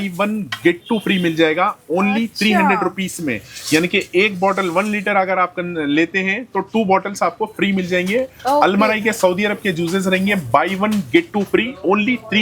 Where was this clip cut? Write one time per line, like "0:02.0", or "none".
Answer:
none